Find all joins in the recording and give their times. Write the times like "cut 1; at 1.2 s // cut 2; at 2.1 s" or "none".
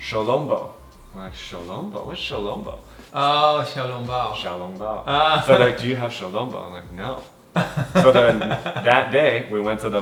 none